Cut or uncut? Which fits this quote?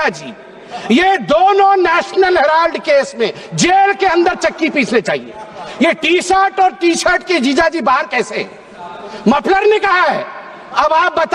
uncut